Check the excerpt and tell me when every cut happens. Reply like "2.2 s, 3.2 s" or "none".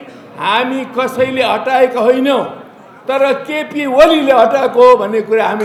none